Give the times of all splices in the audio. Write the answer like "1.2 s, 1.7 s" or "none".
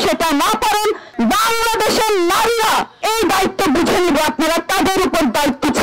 1.1 s, 2.9 s